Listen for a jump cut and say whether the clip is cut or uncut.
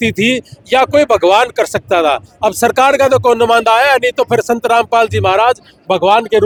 uncut